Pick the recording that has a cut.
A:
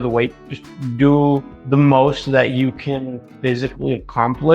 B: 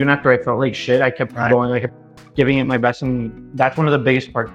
A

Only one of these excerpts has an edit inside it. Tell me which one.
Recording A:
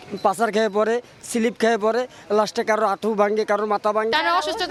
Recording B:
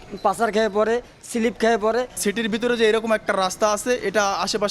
B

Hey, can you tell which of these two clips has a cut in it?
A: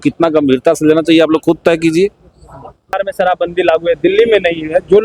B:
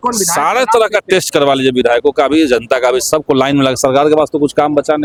A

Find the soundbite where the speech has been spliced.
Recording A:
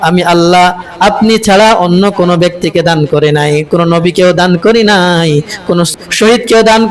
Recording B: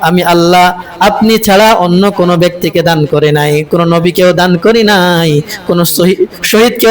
A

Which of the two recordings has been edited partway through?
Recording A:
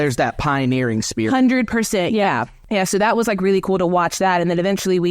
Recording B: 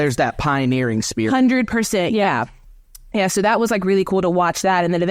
A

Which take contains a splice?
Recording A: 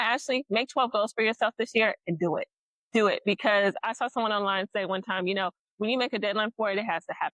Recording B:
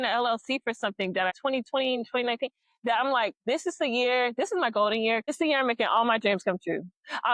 B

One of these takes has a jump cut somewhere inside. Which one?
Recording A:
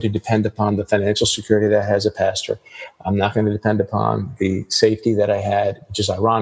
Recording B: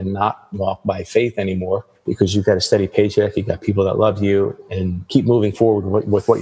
B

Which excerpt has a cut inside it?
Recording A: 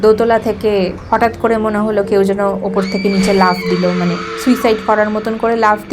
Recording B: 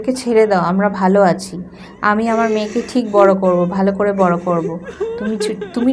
A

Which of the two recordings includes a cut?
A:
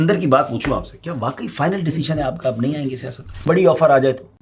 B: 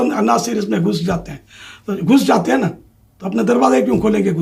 A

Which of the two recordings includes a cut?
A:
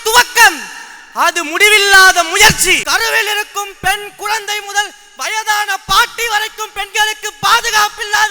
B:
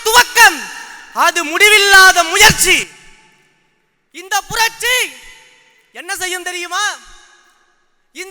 A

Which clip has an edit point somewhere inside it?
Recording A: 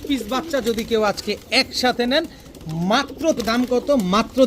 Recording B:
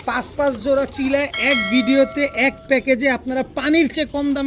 A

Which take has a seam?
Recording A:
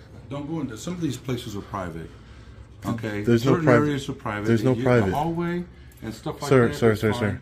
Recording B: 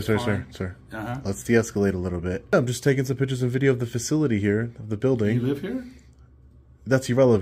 B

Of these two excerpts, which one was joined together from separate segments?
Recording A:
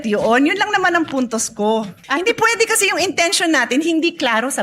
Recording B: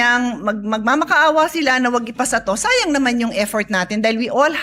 A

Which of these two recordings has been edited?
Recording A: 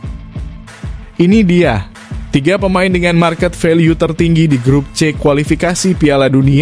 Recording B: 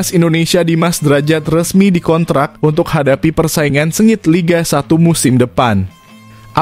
A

